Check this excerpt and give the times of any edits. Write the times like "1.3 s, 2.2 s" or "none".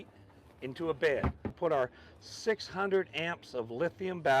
1.5 s